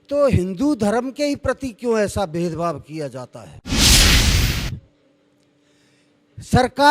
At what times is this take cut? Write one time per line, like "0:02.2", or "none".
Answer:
0:03.6
0:04.6